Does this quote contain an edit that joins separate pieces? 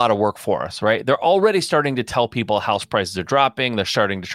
no; 0 cuts

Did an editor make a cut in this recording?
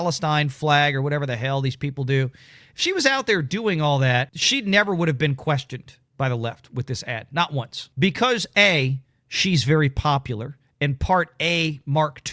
yes; 2 cuts; at 4.4 s, 7.8 s

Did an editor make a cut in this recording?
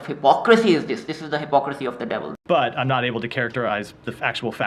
yes; 1 cut; at 2.3 s

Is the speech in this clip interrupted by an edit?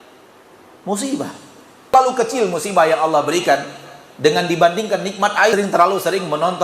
yes; 2 cuts; at 1.9 s, 5.5 s

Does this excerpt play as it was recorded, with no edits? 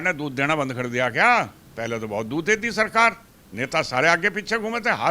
yes; 0 cuts

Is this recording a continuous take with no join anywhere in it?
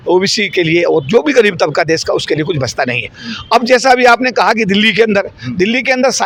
yes; 0 cuts

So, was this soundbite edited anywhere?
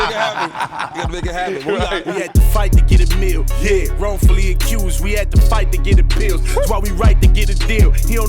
yes; 1 cut; at 2.2 s

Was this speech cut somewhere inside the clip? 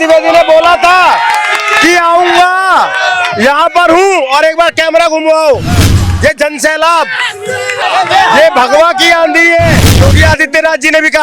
yes; 2 cuts; at 7.8 s, 10.1 s

